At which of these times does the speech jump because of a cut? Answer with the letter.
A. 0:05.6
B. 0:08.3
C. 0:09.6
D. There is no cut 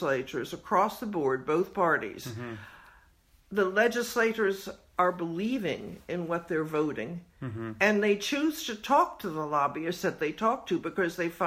D